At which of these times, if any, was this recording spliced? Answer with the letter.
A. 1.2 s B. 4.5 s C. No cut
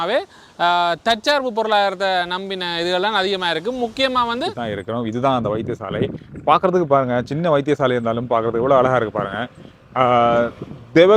B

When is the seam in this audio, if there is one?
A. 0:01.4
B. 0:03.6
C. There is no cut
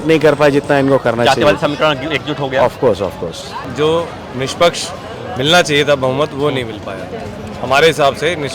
B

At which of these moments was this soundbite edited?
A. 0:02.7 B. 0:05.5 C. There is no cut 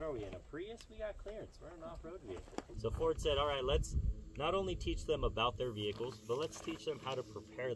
A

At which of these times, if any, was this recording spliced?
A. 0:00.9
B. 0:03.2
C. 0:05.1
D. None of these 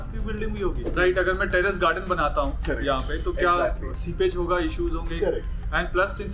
A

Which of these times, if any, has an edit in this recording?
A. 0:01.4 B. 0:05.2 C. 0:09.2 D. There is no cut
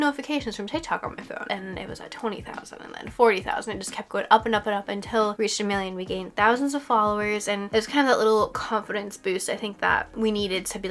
A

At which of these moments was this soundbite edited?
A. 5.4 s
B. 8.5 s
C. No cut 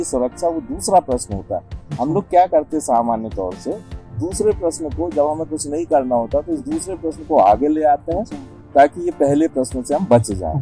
C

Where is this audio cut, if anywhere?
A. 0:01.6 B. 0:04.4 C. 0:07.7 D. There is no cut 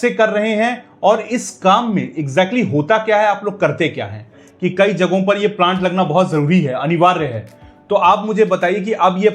B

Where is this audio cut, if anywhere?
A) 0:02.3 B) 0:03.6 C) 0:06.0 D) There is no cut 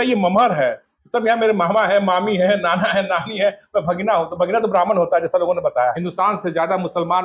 C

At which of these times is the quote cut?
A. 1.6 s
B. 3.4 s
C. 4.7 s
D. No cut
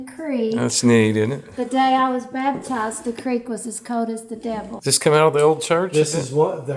C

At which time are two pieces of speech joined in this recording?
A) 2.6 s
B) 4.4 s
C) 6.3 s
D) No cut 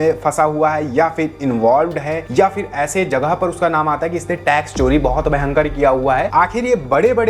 C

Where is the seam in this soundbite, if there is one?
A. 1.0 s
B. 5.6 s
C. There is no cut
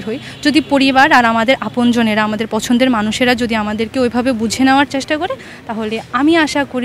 C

